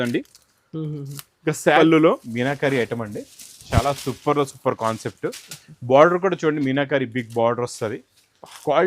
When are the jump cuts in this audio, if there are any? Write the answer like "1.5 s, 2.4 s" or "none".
1.8 s